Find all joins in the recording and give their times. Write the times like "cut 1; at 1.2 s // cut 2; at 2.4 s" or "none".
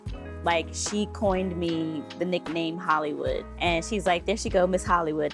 cut 1; at 3.5 s

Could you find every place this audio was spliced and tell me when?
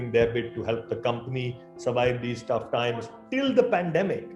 cut 1; at 3.2 s

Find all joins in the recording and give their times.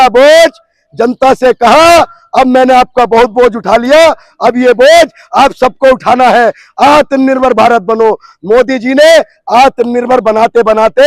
none

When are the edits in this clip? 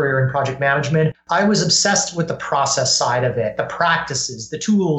cut 1; at 1.2 s

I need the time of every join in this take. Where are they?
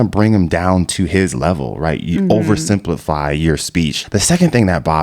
cut 1; at 4.0 s

